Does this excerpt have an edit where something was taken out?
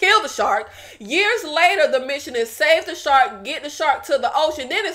no; 0 cuts

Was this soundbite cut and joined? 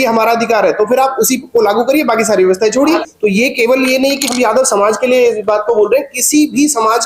yes; 1 cut; at 3.0 s

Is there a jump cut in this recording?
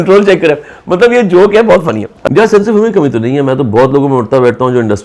yes; 1 cut; at 2.1 s

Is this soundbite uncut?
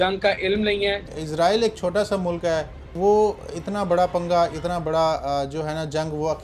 no; 2 cuts; at 1.0 s, 2.8 s

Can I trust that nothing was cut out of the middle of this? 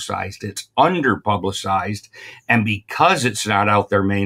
yes; 0 cuts

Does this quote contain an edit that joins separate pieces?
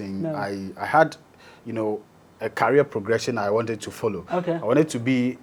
no; 0 cuts

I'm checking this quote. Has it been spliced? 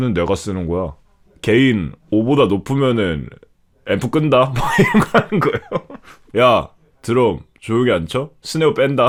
no; 0 cuts

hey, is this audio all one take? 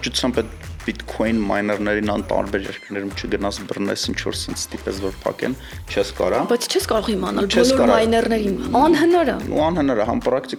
yes; 0 cuts

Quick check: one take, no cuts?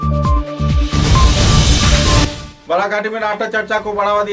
no; 1 cut; at 2.5 s

